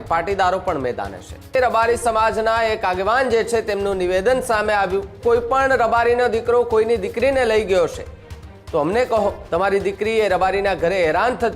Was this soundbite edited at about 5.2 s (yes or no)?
yes